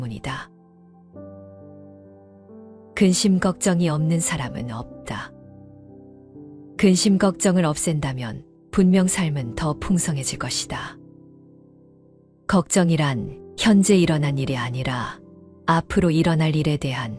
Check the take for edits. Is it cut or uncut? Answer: cut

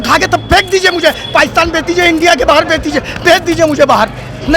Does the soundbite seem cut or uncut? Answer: uncut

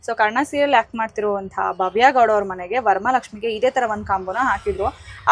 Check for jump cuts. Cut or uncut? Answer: uncut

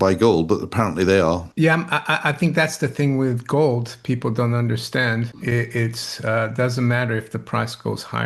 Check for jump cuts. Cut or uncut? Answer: cut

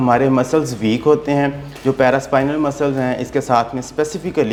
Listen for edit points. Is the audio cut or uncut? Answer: uncut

